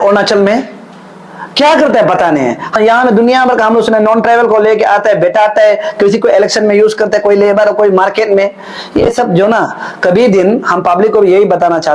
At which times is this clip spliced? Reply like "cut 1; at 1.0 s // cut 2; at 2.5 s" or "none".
cut 1; at 2.8 s